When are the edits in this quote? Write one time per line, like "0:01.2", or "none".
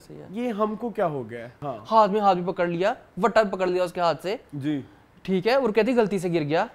0:01.5
0:04.5